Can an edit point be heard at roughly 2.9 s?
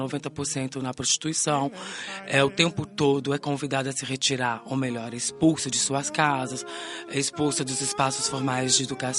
no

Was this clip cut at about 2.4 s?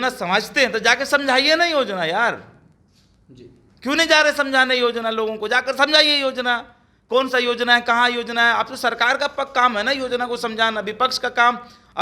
no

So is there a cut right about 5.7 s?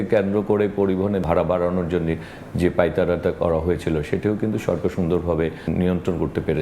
yes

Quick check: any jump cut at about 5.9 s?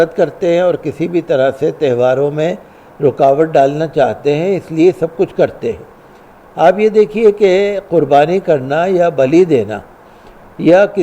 no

